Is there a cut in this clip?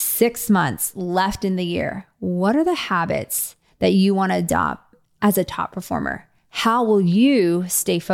no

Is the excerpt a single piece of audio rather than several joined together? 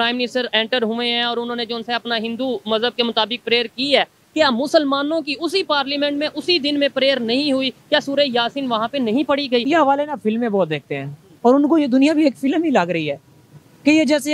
no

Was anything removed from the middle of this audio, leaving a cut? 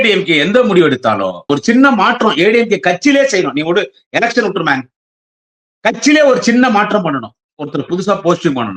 yes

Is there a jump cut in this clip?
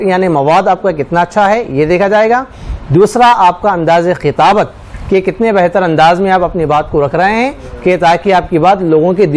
no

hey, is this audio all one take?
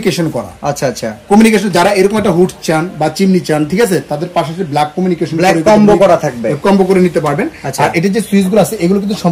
yes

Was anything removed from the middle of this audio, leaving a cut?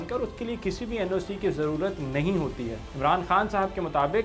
yes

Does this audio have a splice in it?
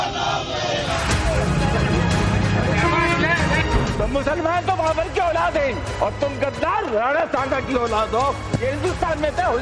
yes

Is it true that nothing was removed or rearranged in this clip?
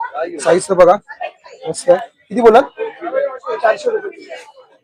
yes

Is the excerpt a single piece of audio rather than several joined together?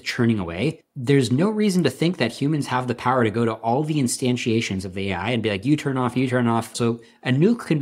no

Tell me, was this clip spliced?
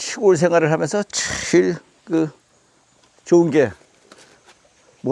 no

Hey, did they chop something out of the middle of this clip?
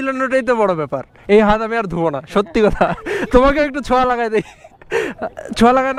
no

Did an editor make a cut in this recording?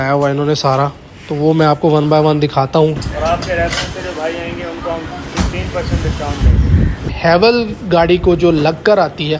yes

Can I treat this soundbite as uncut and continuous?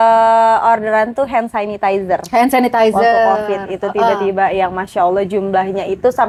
yes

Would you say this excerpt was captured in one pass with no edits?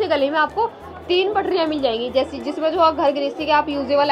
yes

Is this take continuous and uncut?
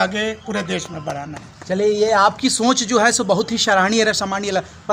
yes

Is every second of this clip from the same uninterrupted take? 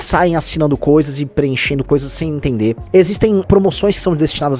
yes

